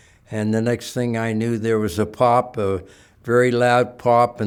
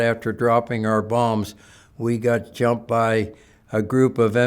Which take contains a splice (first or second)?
second